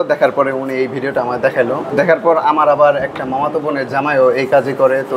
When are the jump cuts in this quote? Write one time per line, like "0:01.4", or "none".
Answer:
0:01.9